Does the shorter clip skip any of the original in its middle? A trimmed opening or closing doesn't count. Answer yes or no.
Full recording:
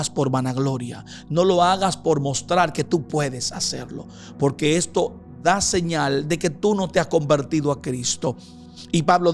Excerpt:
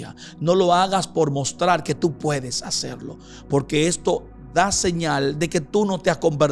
no